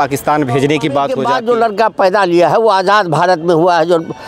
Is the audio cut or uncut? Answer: cut